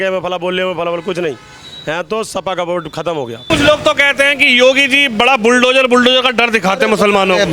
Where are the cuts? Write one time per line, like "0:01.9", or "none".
0:03.5